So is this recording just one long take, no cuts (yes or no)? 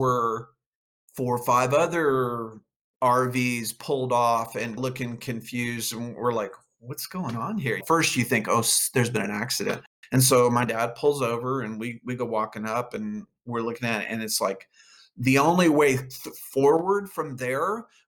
yes